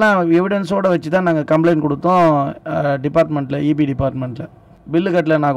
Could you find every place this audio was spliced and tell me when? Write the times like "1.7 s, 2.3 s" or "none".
4.4 s